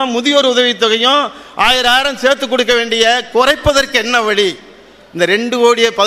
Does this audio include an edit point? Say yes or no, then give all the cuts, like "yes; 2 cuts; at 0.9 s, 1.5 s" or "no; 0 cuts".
no; 0 cuts